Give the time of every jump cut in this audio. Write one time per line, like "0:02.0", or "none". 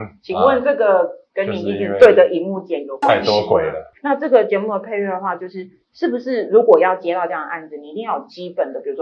none